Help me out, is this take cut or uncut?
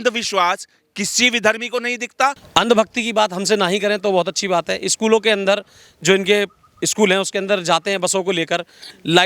cut